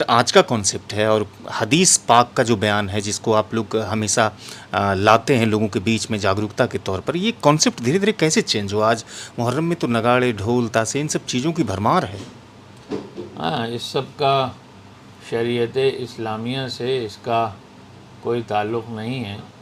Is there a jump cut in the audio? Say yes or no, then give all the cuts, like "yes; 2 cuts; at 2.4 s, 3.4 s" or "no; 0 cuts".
no; 0 cuts